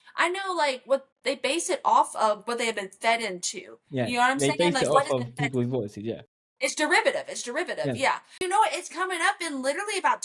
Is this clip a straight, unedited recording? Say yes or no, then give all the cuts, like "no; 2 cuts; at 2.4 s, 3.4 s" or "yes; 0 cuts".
no; 1 cut; at 8.4 s